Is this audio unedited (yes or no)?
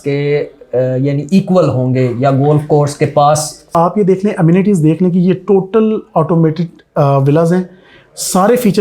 no